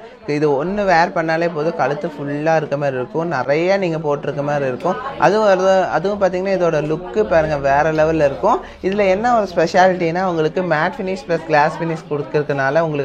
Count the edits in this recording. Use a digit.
0